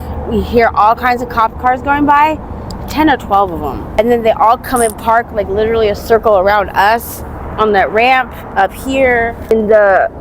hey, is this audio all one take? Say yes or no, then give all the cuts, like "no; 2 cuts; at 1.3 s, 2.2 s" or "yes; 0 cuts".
no; 3 cuts; at 3.8 s, 8.4 s, 9.5 s